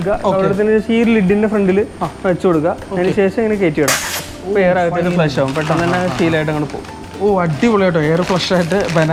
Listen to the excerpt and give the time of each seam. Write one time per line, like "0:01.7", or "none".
none

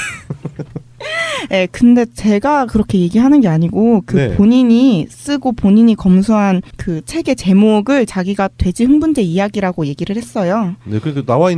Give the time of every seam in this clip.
none

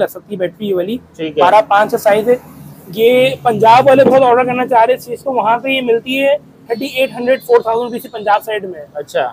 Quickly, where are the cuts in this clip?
none

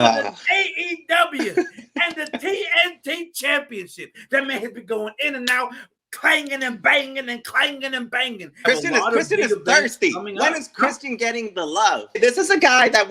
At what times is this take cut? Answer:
0:04.2
0:08.6
0:12.2

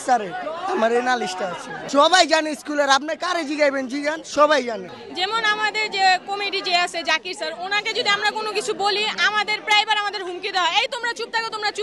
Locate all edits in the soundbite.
none

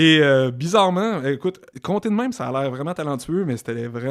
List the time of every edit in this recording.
0:01.7

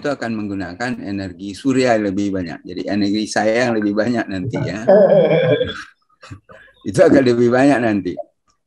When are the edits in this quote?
none

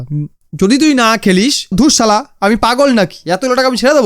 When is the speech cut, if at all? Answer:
0:01.7

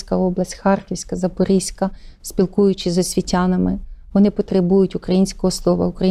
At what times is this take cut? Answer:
none

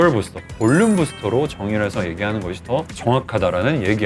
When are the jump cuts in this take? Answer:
0:02.9

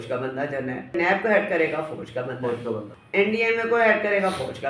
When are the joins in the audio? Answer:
0:00.9
0:02.9

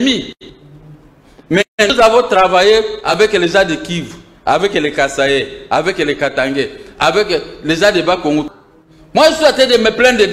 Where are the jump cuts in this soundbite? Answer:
0:08.6

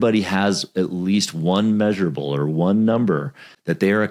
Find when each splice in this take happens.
none

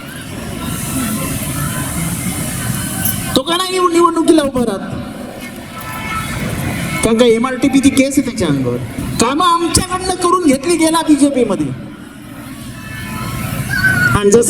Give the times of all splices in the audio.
0:09.0

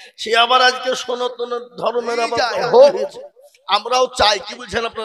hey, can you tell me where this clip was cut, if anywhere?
0:02.5

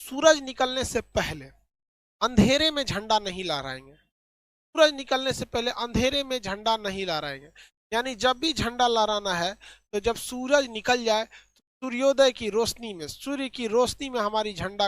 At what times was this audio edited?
none

